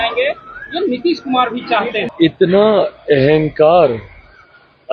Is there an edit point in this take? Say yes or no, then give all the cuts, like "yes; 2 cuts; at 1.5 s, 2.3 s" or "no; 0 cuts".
yes; 1 cut; at 2.1 s